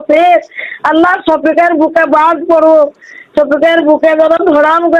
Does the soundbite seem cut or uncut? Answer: uncut